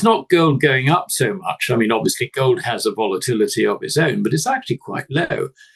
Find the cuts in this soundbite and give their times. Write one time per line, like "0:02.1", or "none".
none